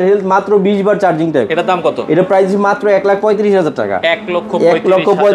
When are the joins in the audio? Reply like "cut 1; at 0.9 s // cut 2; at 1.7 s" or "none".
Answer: none